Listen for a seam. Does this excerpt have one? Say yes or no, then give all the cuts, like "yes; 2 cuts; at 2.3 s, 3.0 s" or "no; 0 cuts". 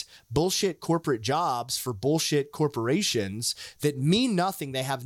no; 0 cuts